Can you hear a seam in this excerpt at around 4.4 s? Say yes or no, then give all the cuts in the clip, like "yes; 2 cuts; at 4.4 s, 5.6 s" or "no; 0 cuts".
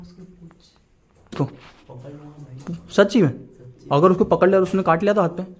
no; 1 cut; at 1.3 s